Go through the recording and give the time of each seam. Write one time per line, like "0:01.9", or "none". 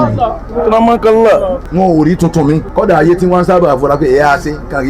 0:01.6
0:02.7